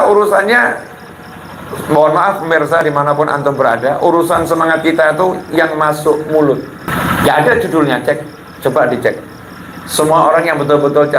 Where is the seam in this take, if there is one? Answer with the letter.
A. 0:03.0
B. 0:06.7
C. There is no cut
B